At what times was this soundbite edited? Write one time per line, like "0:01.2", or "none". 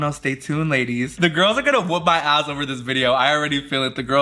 0:01.1